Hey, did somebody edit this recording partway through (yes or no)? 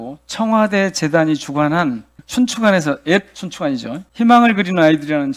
yes